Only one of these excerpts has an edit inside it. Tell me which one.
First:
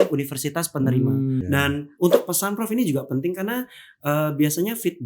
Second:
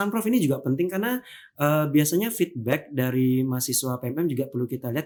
first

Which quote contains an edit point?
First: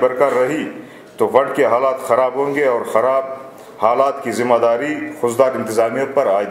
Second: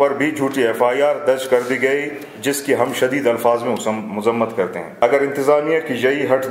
second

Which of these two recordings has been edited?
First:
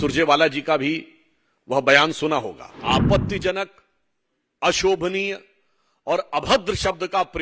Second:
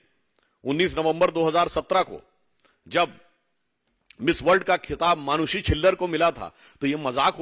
first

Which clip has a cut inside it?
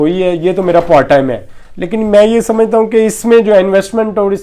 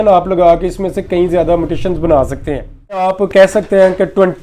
second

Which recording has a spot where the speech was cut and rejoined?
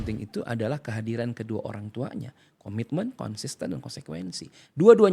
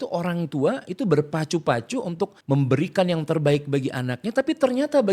second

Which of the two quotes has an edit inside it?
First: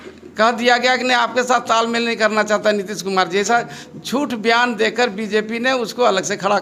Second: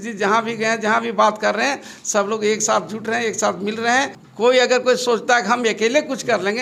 second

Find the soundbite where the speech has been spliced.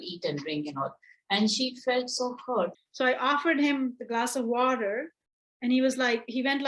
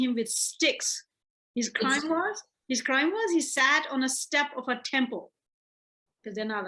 first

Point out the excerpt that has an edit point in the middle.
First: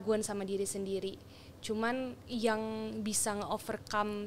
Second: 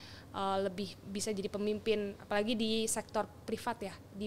first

